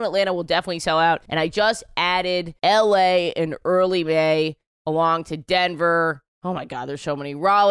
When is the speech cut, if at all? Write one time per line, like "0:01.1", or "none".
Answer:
none